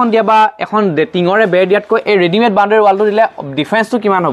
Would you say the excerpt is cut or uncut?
uncut